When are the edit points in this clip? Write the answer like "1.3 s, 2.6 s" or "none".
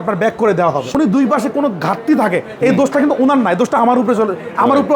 0.9 s